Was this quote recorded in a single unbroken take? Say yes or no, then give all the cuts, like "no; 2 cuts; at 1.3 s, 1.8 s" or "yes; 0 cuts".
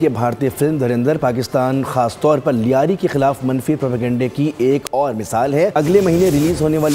no; 1 cut; at 5.7 s